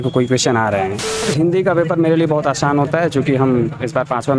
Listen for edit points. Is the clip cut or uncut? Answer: cut